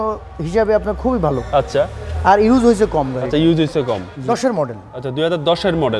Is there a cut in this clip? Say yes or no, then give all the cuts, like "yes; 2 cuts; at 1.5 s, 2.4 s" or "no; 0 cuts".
yes; 1 cut; at 4.1 s